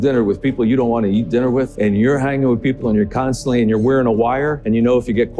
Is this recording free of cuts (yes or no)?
no